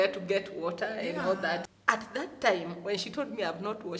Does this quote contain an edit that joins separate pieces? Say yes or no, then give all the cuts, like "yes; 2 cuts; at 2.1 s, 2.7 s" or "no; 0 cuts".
yes; 1 cut; at 1.7 s